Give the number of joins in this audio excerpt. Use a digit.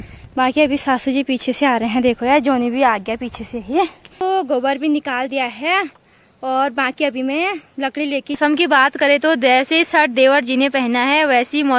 2